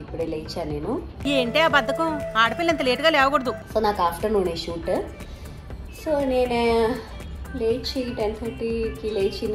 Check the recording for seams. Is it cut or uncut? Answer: uncut